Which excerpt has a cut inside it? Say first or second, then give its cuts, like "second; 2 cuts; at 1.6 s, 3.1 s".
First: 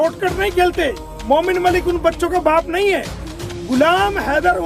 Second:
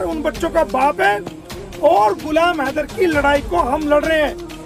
first; 1 cut; at 1.1 s